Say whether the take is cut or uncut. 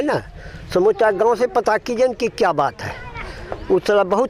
uncut